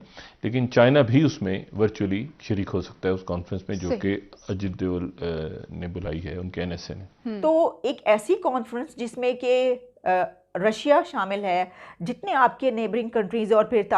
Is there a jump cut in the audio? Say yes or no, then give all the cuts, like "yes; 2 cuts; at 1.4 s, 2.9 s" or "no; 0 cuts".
yes; 1 cut; at 7.4 s